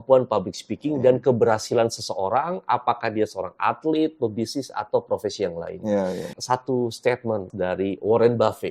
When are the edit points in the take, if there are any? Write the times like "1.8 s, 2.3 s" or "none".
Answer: 6.3 s, 7.5 s